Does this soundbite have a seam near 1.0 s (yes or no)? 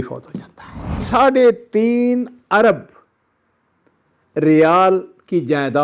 yes